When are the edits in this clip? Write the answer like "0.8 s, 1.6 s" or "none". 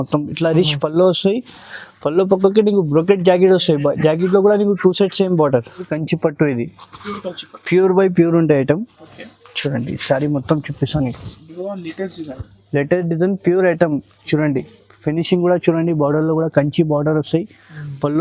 5.9 s